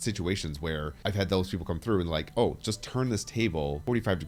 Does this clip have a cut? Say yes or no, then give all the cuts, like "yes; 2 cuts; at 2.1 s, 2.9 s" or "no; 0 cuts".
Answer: no; 0 cuts